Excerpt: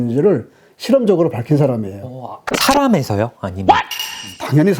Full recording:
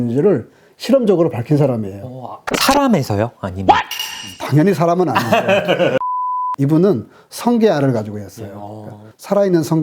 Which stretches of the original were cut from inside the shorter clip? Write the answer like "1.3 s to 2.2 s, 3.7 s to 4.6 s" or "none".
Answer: none